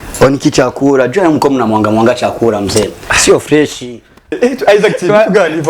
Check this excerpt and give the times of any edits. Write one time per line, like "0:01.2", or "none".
0:04.3